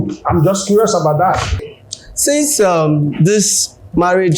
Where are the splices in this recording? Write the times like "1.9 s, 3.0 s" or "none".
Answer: 1.6 s